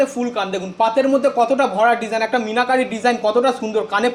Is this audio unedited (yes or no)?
yes